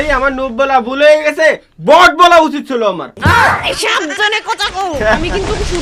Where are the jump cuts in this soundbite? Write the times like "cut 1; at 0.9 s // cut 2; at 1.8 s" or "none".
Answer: none